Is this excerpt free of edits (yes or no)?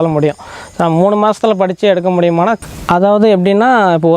no